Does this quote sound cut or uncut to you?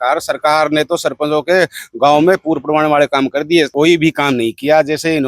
cut